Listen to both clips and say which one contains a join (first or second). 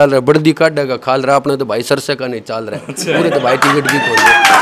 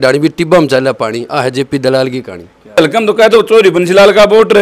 second